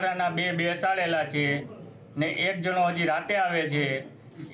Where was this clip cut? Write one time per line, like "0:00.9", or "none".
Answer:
none